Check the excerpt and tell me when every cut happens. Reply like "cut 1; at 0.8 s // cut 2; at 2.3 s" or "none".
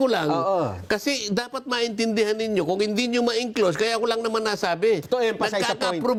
none

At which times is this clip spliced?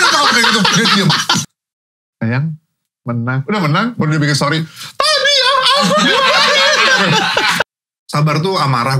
cut 1; at 1.4 s // cut 2; at 7.6 s

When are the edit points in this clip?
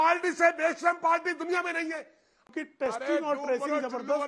cut 1; at 2.5 s

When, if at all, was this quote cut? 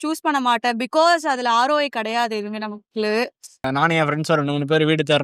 cut 1; at 3.6 s

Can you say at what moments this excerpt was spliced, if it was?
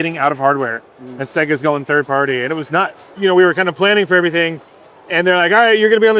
cut 1; at 3.1 s

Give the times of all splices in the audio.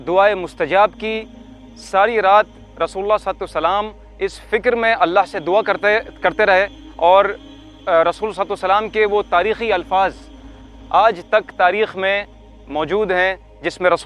none

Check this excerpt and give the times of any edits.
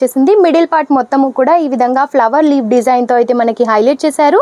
none

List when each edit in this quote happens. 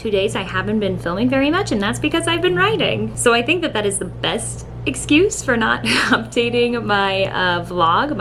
none

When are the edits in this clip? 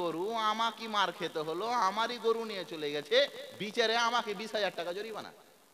none

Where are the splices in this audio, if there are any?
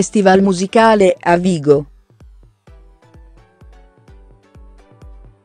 cut 1; at 1.8 s

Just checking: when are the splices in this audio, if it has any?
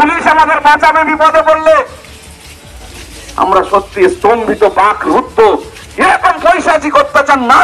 none

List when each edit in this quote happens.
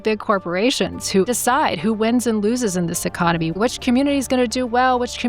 cut 1; at 1.3 s // cut 2; at 3.6 s

